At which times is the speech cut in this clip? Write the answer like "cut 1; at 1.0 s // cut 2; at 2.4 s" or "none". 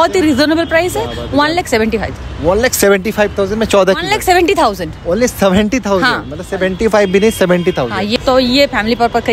cut 1; at 8.1 s